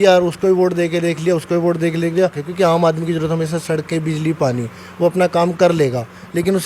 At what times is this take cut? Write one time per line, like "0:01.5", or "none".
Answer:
0:02.4